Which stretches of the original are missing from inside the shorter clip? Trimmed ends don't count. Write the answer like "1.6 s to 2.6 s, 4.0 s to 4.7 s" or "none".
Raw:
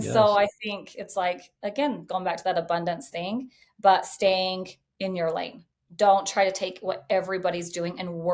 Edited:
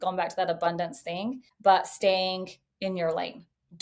3.5 s to 3.6 s